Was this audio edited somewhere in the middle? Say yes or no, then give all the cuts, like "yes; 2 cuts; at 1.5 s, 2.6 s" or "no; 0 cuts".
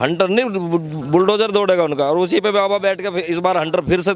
no; 0 cuts